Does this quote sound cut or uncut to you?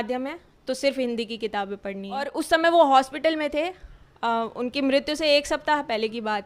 cut